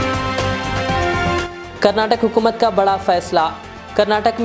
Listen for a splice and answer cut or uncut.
cut